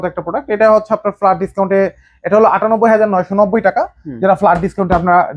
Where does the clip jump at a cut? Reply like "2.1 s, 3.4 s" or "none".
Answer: none